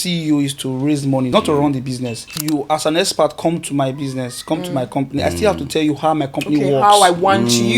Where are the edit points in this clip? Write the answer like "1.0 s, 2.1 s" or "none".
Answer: 1.3 s, 2.3 s